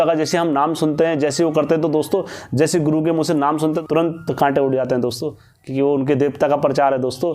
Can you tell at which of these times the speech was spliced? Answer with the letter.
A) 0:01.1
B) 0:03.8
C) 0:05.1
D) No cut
B